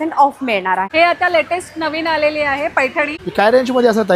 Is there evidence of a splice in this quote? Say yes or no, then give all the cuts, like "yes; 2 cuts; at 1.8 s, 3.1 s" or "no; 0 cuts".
yes; 2 cuts; at 0.9 s, 3.2 s